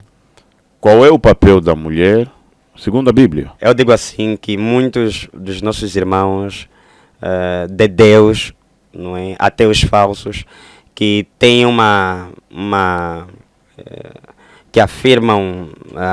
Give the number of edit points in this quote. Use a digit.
1